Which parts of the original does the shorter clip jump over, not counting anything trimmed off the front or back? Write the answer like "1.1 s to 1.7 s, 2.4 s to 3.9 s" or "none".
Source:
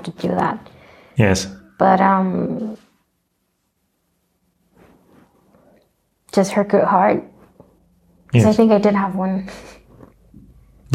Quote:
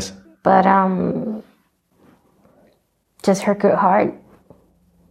3.3 s to 5.0 s

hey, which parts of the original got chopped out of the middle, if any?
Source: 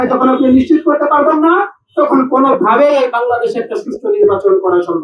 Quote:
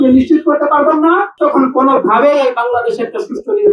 1.7 s to 1.9 s

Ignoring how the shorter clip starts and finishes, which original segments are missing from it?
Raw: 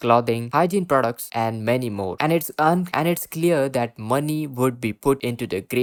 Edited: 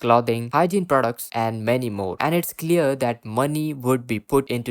2.1 s to 2.9 s

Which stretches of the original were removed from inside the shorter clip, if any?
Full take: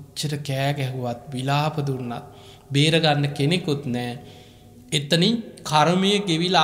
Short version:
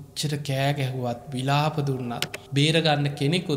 2.3 s to 2.5 s

